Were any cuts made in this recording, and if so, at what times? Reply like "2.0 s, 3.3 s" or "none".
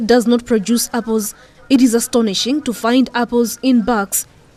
none